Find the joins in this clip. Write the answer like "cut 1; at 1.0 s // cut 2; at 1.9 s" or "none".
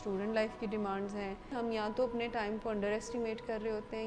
cut 1; at 1.6 s